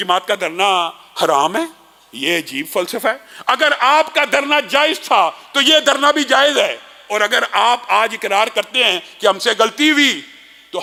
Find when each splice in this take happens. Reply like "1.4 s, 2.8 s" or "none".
none